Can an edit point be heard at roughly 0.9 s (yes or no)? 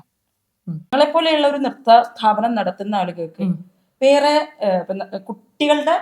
yes